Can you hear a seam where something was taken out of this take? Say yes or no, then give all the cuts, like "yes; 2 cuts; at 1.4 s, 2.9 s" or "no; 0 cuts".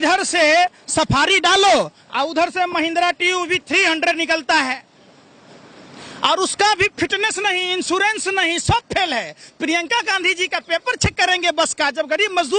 no; 0 cuts